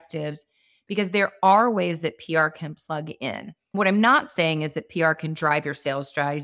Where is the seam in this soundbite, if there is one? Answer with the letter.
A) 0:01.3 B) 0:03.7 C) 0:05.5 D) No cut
B